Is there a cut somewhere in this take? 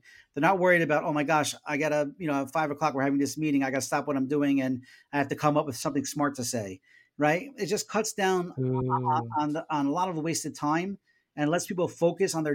no; 0 cuts

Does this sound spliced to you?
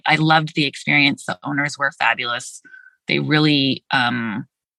no; 0 cuts

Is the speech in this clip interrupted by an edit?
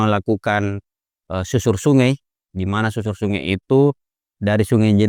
no; 0 cuts

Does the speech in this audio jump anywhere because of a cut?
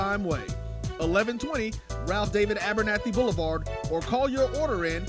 no; 0 cuts

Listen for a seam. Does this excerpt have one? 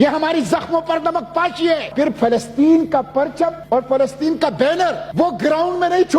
yes; 3 cuts; at 1.9 s, 3.6 s, 5.0 s

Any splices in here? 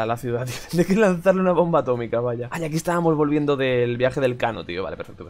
no; 0 cuts

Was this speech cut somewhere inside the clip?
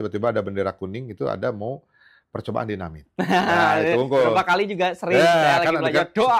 no; 0 cuts

